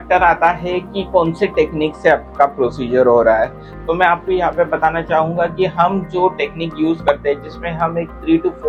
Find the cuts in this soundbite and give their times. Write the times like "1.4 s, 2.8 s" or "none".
none